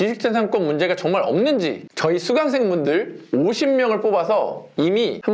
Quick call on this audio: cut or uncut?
uncut